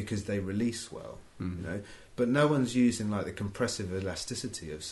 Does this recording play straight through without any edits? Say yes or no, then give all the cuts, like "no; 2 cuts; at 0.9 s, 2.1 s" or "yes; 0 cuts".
yes; 0 cuts